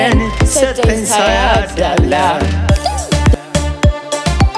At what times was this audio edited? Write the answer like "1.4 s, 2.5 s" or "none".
none